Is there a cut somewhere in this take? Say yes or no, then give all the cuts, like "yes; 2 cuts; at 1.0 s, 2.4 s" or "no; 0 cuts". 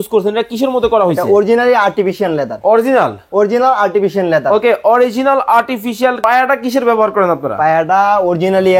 yes; 1 cut; at 6.2 s